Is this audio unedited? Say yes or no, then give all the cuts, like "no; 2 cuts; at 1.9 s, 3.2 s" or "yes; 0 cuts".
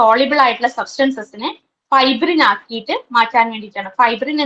yes; 0 cuts